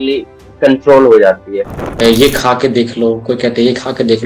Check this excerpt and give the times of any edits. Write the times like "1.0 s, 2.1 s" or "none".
1.8 s